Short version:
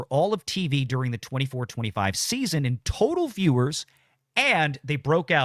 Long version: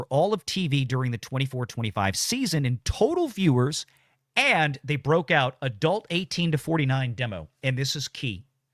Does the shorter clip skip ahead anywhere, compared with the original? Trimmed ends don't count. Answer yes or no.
no